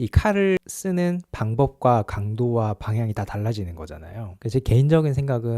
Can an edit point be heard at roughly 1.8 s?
no; 1 cut; at 4.3 s

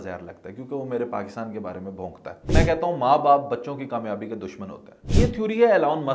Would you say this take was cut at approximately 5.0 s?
yes; 2 cuts; at 2.5 s, 5.0 s

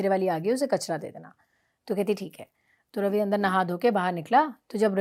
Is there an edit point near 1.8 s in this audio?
no; 0 cuts

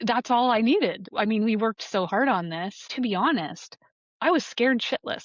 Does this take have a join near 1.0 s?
yes; 2 cuts; at 1.0 s, 2.9 s

